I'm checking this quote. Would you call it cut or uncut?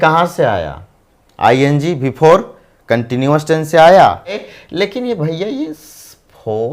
cut